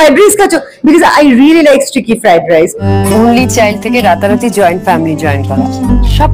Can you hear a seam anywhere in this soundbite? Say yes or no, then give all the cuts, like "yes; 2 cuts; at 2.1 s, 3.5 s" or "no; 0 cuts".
yes; 1 cut; at 2.8 s